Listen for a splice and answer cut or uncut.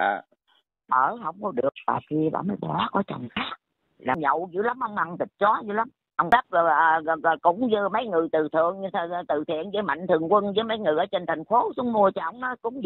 cut